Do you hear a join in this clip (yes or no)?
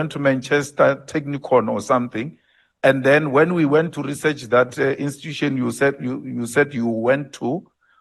no